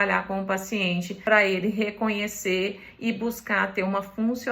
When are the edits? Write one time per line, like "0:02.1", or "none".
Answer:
0:01.1